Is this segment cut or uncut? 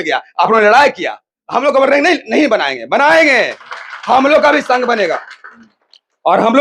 uncut